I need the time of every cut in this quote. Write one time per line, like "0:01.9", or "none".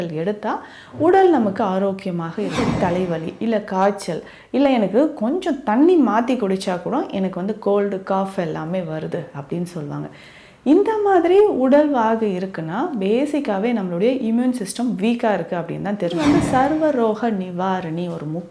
0:02.6
0:16.2